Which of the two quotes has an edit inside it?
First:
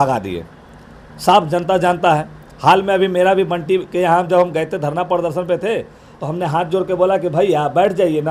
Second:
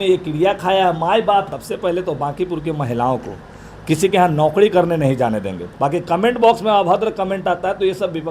second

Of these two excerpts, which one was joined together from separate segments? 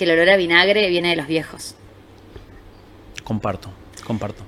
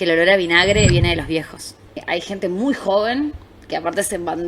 second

